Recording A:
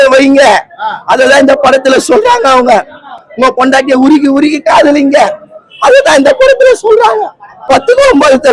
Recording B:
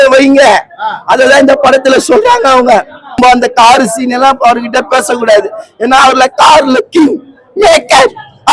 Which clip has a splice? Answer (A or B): B